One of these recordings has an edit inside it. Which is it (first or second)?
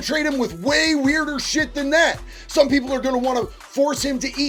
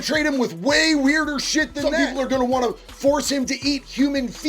second